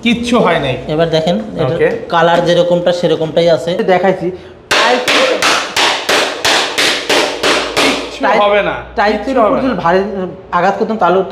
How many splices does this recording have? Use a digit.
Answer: 1